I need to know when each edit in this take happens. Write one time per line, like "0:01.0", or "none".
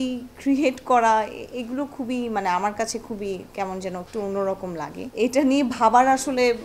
none

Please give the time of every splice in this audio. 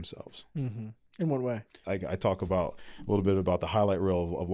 0:01.8

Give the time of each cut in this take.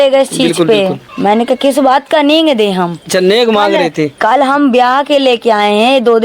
0:01.1

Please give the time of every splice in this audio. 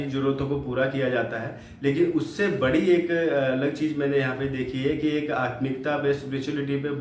none

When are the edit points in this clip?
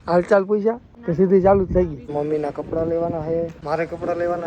0:00.9
0:02.1
0:03.6

